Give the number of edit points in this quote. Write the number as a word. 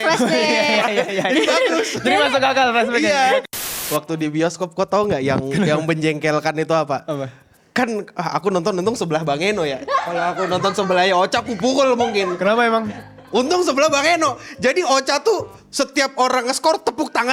one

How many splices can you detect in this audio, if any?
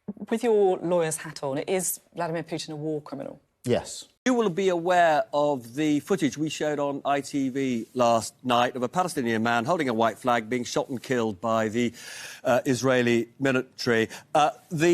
one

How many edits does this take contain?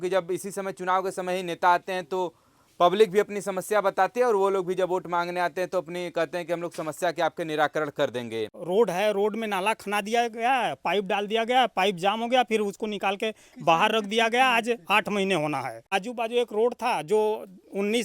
two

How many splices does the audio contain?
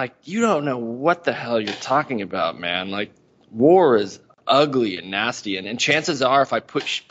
zero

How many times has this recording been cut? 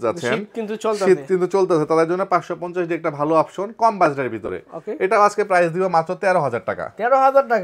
zero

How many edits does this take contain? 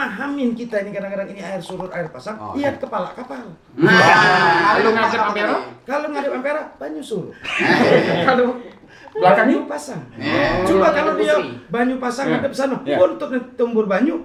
zero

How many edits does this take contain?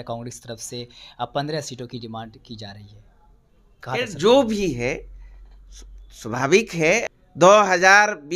one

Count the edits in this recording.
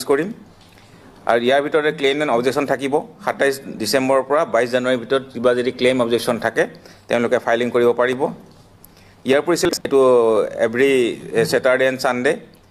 one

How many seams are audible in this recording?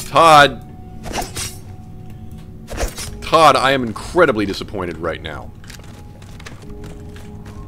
zero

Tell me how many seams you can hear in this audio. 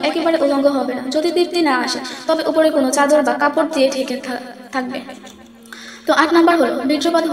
zero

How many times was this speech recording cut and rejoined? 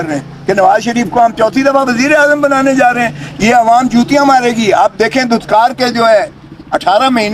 zero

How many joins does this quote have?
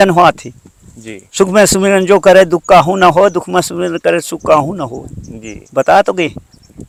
zero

